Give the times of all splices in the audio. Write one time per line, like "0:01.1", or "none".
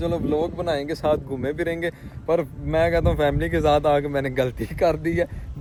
none